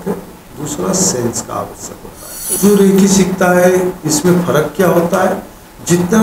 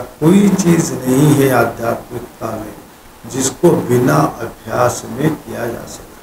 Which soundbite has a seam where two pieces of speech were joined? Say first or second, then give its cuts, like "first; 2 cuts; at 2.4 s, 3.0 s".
first; 1 cut; at 2.5 s